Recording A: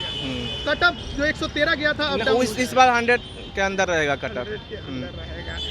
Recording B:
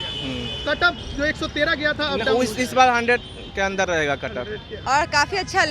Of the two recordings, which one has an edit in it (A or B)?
B